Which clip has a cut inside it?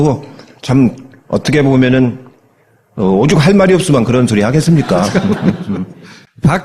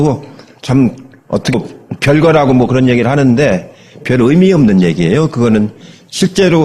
first; 1 cut; at 1.5 s

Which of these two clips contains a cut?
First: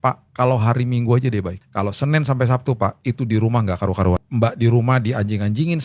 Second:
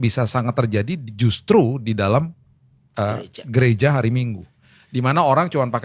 first; 2 cuts; at 1.6 s, 4.3 s

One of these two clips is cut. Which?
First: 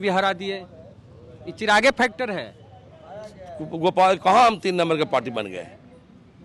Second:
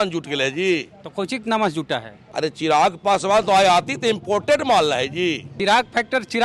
second; 2 cuts; at 2.2 s, 5.5 s

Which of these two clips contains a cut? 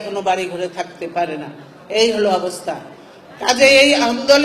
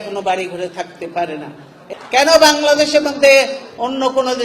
second; 1 cut; at 1.8 s

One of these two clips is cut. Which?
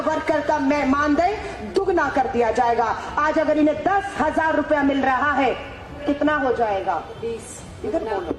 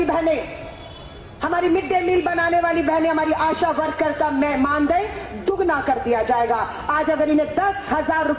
first; 1 cut; at 6.0 s

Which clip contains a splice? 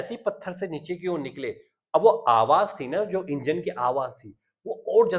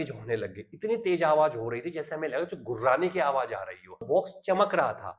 second; 1 cut; at 4.0 s

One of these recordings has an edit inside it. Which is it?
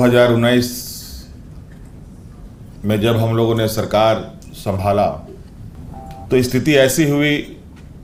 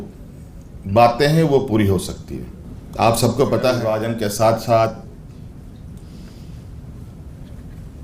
second; 1 cut; at 4.1 s

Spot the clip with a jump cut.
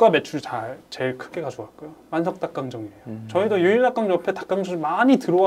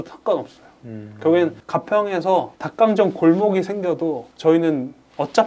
second; 3 cuts; at 1.6 s, 2.6 s, 4.3 s

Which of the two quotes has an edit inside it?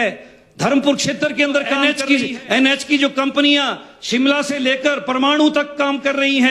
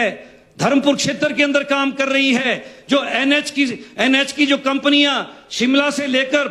first; 1 cut; at 1.7 s

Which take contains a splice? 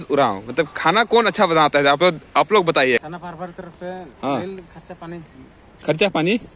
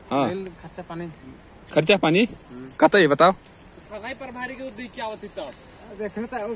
first; 1 cut; at 3.0 s

